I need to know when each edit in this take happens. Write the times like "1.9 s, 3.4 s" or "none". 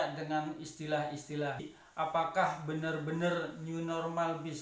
1.7 s